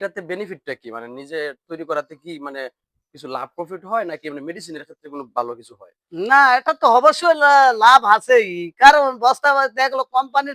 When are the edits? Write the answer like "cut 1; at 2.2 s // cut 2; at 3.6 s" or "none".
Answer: none